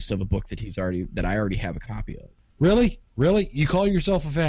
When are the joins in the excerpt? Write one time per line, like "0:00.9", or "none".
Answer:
0:02.4